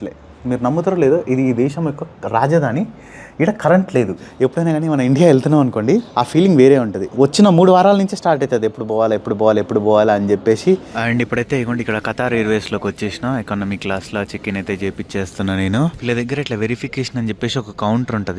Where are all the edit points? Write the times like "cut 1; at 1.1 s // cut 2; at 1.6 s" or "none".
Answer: cut 1; at 4.2 s // cut 2; at 6.1 s // cut 3; at 7.0 s // cut 4; at 10.9 s // cut 5; at 16.0 s